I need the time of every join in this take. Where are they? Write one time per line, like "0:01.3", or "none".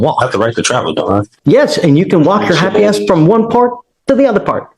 0:01.3